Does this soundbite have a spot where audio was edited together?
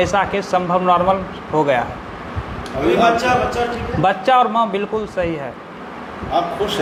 no; 0 cuts

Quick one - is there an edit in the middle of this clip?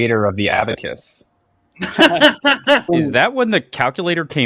yes; 1 cut; at 2.9 s

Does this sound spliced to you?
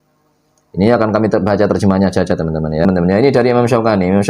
yes; 1 cut; at 2.9 s

